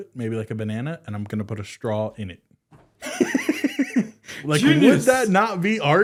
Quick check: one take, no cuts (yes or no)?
yes